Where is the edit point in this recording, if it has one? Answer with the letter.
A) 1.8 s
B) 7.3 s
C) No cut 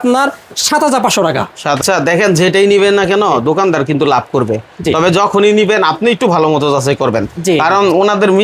A